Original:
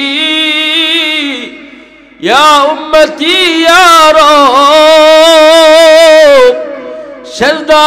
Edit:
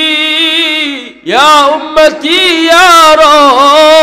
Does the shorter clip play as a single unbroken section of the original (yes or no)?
no